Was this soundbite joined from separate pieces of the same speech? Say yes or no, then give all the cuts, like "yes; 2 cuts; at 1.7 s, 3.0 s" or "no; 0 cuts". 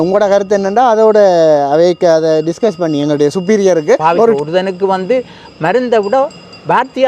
yes; 1 cut; at 4.4 s